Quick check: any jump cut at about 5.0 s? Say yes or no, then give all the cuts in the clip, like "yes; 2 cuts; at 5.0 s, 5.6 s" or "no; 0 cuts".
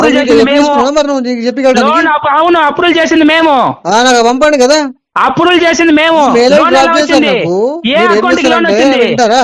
no; 0 cuts